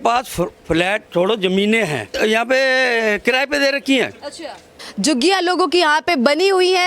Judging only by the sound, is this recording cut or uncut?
cut